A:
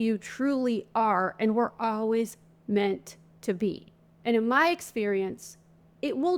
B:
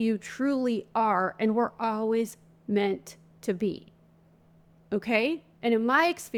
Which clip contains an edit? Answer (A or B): A